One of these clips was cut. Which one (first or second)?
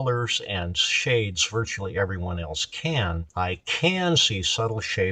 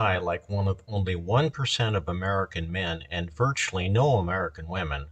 first